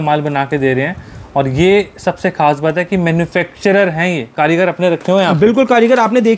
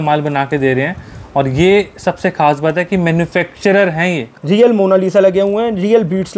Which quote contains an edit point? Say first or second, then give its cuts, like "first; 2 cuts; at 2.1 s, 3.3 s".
second; 1 cut; at 4.2 s